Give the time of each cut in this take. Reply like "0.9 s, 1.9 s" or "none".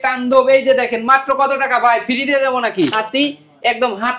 2.9 s

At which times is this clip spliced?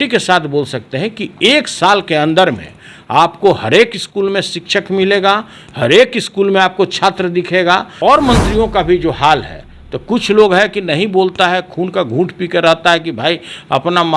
7.9 s

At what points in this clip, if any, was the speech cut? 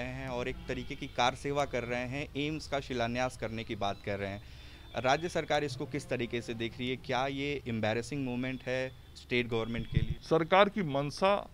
10.1 s

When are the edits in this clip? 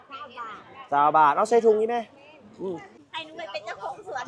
3.0 s

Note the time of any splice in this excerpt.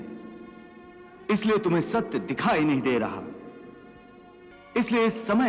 4.6 s

